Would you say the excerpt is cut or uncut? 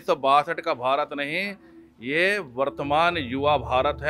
uncut